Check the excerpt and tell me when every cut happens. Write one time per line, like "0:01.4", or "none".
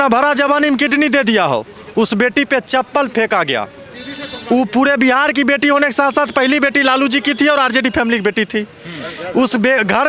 none